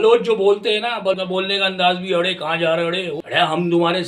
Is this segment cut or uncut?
cut